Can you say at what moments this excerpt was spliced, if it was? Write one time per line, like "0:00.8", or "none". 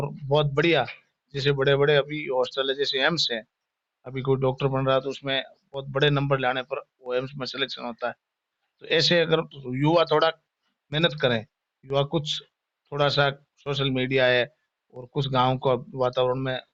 none